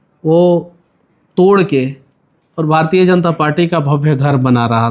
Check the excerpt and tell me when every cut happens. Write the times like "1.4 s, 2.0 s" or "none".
none